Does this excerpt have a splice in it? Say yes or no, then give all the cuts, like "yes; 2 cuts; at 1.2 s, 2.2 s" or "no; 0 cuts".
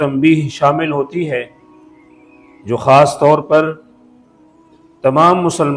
no; 0 cuts